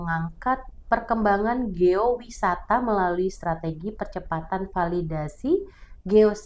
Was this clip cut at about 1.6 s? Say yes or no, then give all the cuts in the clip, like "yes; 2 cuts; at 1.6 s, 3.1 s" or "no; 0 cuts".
no; 0 cuts